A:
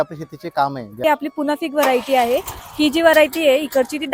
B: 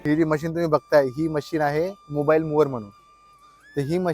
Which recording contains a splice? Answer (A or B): A